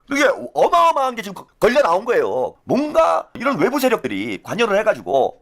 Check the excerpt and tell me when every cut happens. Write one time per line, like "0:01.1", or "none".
0:02.6